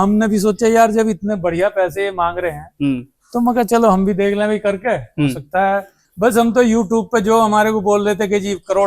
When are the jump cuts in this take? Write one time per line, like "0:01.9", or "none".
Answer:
0:06.0